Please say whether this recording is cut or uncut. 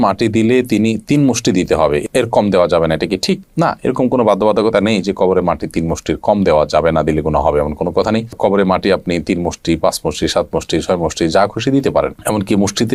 uncut